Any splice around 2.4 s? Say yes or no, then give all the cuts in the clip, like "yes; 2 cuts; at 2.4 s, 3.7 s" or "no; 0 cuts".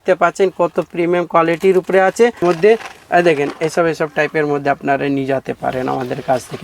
yes; 1 cut; at 2.4 s